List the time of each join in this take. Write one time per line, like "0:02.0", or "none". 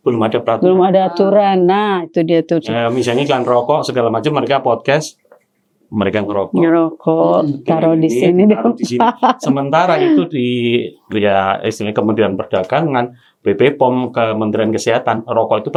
none